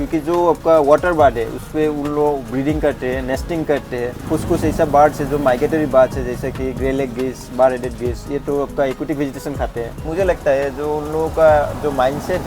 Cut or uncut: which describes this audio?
cut